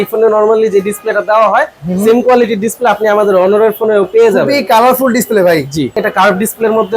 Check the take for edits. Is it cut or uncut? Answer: cut